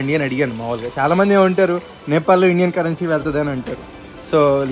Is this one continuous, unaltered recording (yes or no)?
yes